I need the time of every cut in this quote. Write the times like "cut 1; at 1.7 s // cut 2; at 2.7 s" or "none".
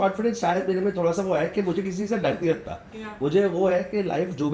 none